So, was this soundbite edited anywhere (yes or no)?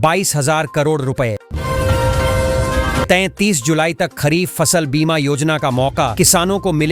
yes